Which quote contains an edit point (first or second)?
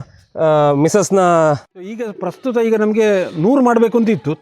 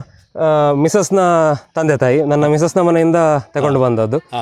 first